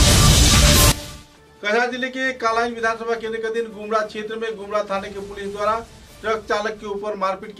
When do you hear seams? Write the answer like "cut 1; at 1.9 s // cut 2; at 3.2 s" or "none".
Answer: cut 1; at 0.9 s